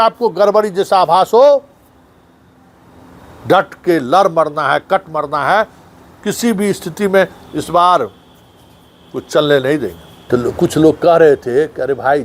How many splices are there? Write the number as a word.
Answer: one